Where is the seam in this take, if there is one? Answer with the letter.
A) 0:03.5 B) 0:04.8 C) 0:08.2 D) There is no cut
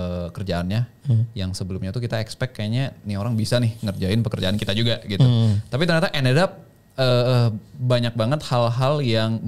D